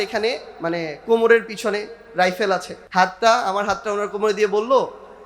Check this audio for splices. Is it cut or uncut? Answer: cut